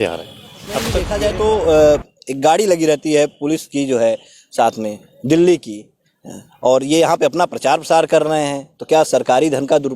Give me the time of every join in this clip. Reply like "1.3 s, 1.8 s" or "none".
1.0 s